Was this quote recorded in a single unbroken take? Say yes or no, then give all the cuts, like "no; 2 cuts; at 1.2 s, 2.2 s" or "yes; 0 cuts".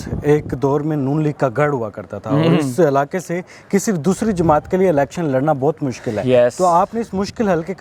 yes; 0 cuts